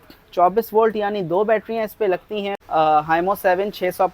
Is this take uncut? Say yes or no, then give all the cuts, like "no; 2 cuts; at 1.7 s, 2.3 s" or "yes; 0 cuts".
no; 1 cut; at 2.5 s